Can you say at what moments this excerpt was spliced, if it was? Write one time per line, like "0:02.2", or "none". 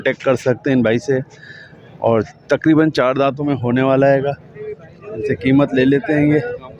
none